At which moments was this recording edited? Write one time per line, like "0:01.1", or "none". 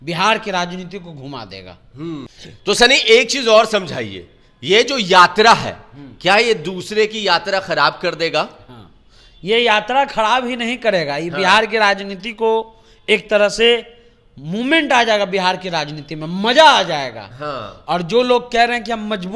0:02.3